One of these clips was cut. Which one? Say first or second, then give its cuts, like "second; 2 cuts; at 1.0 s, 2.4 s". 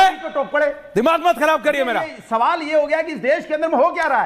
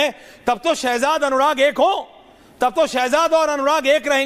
first; 1 cut; at 1.9 s